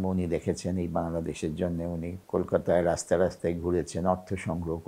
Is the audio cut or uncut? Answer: cut